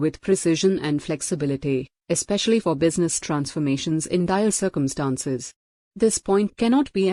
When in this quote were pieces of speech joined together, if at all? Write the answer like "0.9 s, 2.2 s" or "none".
none

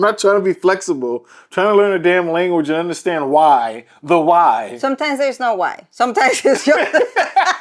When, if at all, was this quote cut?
none

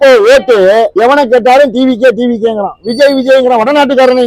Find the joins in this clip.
0.9 s

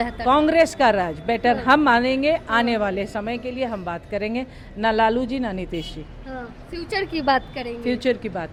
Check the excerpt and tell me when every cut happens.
none

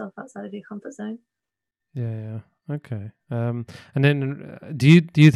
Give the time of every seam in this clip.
none

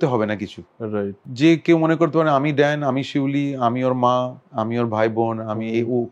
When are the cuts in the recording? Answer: 1.2 s, 4.4 s

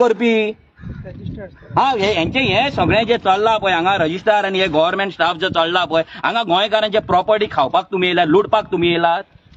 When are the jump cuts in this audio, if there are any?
none

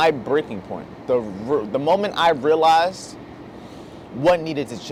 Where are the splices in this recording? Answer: none

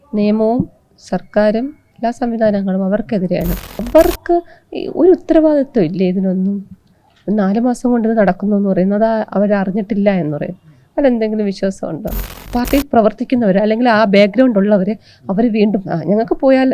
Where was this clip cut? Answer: 1.8 s, 3.8 s, 12.4 s

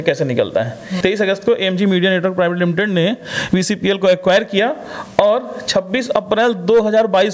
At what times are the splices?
1.0 s

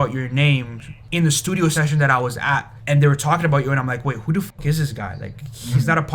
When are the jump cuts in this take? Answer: 1.0 s, 2.7 s

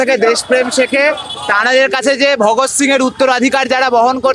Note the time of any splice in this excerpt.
none

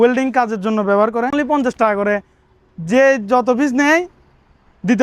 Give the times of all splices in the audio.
1.3 s

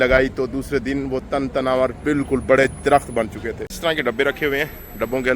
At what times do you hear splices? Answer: 3.6 s

